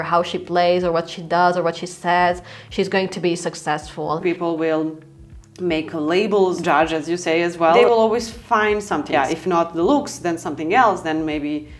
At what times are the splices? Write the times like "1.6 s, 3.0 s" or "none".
4.2 s, 6.6 s, 7.8 s, 9.1 s